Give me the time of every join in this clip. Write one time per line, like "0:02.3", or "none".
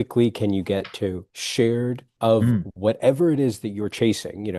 0:01.3
0:02.1